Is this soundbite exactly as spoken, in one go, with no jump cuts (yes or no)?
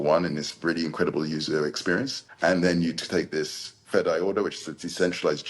no